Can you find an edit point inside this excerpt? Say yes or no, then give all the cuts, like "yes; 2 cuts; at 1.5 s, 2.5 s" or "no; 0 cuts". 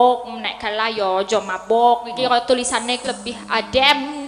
yes; 1 cut; at 3.0 s